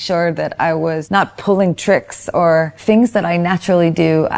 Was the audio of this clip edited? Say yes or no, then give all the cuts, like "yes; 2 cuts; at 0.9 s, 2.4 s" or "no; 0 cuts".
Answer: yes; 2 cuts; at 1.0 s, 2.7 s